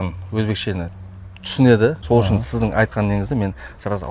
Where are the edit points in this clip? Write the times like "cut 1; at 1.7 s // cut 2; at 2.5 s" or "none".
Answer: cut 1; at 2.0 s